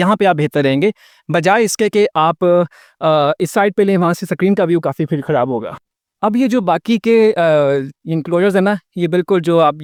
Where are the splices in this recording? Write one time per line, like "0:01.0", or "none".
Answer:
none